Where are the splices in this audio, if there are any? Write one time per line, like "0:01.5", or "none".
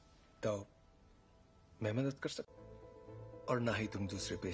none